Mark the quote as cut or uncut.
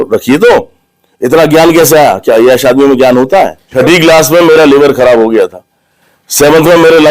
cut